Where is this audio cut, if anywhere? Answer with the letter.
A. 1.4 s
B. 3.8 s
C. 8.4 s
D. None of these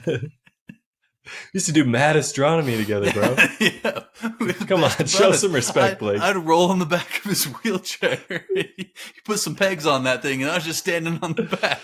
D